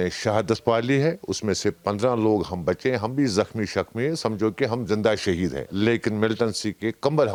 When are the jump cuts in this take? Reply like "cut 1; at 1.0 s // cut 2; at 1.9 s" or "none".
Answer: none